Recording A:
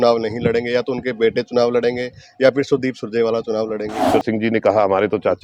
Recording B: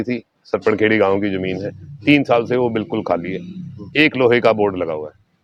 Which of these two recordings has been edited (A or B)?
A